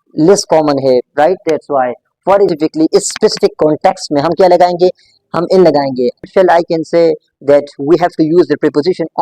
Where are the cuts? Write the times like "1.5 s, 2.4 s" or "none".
2.5 s, 6.3 s